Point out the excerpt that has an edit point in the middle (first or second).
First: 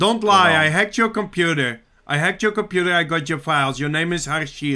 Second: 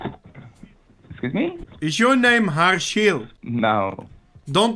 second